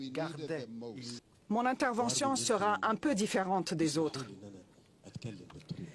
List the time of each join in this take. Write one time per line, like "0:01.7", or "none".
0:01.2